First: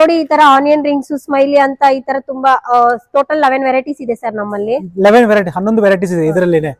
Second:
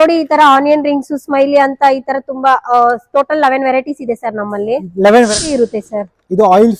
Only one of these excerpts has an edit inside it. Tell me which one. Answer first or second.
second